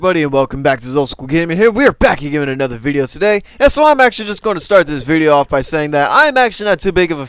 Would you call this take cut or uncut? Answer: uncut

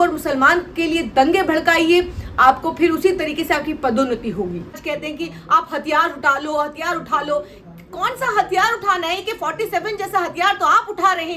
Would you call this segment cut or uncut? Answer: cut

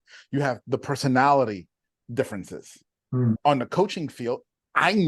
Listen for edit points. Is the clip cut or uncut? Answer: cut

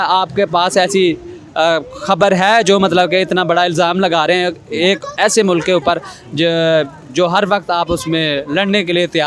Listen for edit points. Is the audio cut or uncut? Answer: uncut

